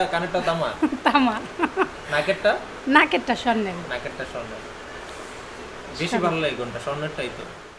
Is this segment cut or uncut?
uncut